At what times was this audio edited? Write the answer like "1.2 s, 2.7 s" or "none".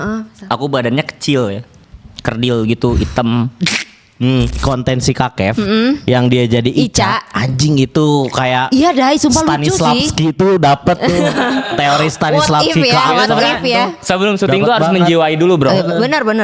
4.6 s